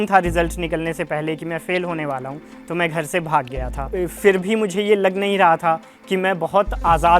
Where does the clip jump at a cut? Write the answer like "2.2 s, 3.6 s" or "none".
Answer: 3.8 s

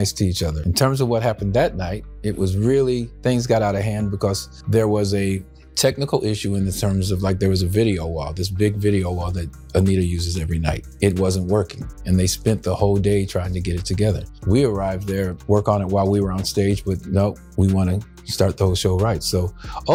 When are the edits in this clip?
none

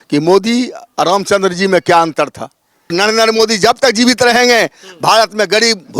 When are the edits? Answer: 2.9 s

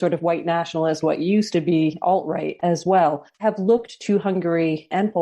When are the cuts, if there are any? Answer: none

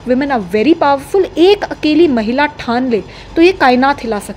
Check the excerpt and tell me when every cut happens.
none

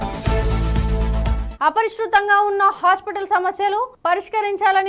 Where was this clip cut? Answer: 1.4 s

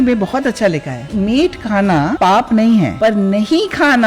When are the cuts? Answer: 1.1 s, 2.2 s, 2.9 s

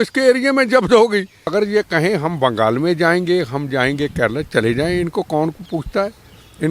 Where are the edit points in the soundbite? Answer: 1.5 s

